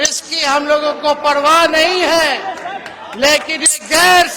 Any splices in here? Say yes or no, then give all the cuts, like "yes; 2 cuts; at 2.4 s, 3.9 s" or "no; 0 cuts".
no; 0 cuts